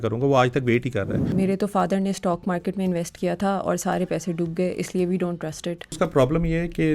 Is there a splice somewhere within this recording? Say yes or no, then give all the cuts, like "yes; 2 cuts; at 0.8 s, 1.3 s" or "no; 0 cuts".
yes; 2 cuts; at 1.3 s, 6.0 s